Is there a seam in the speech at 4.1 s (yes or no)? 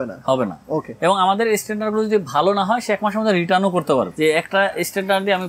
yes